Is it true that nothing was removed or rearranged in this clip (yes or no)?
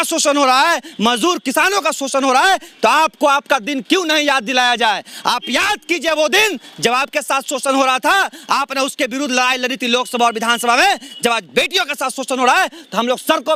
yes